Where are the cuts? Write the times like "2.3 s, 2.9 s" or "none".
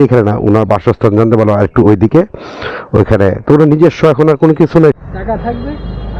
5.0 s